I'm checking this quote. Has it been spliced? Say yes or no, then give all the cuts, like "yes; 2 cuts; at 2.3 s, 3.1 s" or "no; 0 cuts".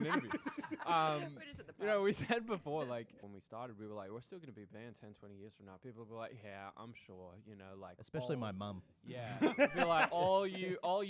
yes; 1 cut; at 3.2 s